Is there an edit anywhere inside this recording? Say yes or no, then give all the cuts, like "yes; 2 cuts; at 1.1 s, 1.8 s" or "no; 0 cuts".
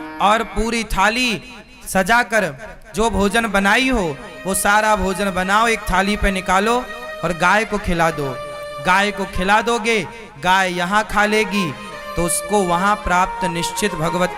no; 0 cuts